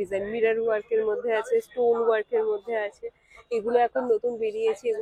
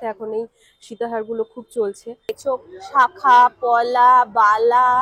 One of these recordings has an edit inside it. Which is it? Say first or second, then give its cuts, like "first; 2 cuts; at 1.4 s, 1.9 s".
second; 1 cut; at 2.4 s